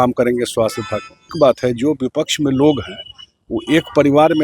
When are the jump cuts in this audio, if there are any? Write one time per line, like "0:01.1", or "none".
0:01.3